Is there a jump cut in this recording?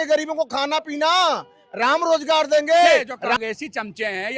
yes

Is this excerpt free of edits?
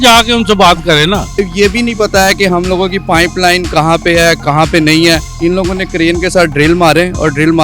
no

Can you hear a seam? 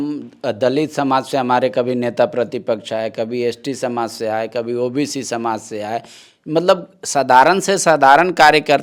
no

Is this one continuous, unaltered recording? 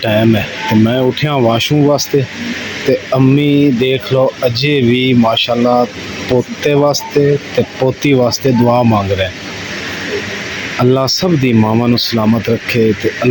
yes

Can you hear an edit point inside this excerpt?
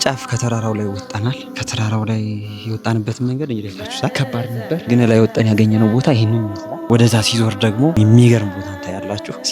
no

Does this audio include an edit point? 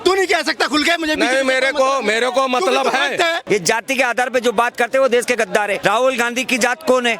yes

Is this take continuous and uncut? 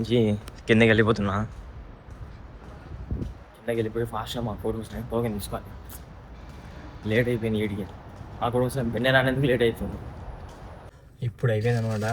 no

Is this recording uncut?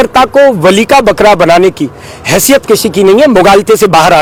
yes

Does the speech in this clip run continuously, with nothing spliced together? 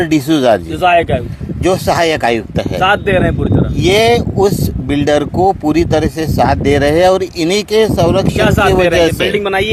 yes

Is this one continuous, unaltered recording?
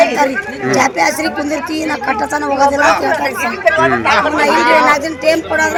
yes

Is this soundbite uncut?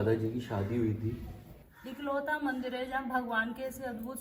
no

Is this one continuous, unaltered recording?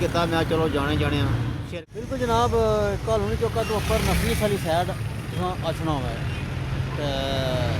no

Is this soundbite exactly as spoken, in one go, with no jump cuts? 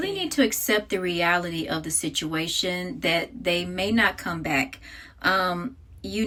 yes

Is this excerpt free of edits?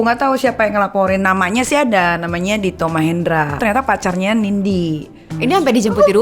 no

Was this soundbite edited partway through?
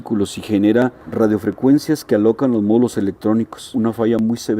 yes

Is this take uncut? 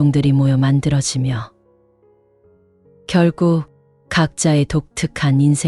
yes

